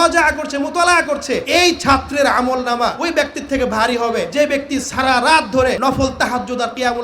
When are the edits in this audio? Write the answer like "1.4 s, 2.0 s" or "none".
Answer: 1.4 s, 3.0 s, 4.3 s, 5.8 s